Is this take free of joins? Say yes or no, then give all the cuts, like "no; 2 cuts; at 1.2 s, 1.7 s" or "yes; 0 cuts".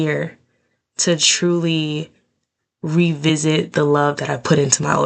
yes; 0 cuts